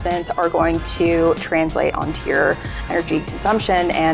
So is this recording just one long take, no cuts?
yes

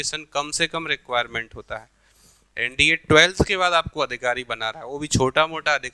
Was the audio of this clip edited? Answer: no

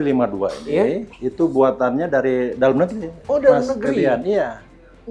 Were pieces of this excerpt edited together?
no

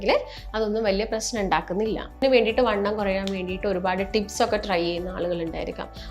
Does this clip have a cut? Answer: yes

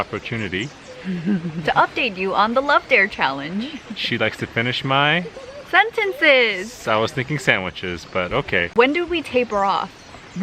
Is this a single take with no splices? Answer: yes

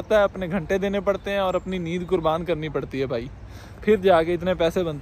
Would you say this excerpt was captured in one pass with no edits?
yes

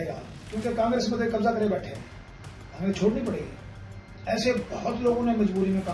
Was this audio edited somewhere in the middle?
no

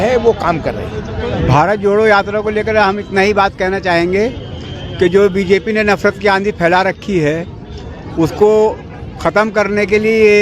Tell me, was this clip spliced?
no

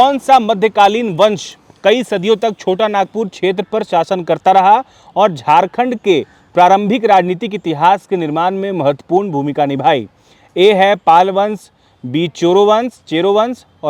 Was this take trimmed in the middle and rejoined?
no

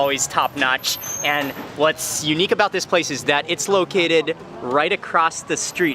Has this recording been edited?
no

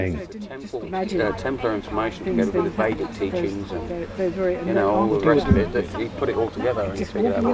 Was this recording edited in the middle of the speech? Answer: no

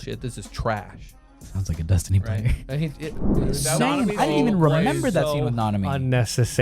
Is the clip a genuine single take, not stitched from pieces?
no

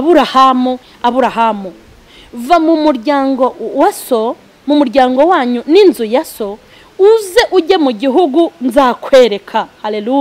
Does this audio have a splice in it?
no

